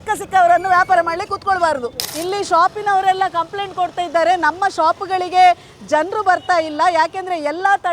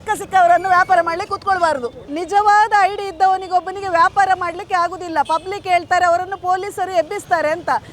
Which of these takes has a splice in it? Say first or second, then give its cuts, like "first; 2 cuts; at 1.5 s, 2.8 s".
first; 1 cut; at 2.0 s